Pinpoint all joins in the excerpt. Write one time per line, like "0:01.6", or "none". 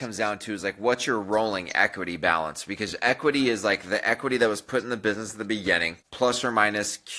0:06.0